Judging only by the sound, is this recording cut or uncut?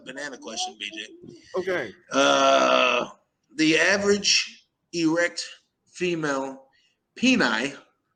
uncut